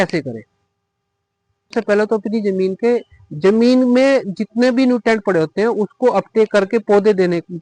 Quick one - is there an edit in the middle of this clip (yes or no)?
yes